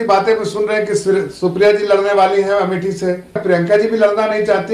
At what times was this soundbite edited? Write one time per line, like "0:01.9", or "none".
0:03.4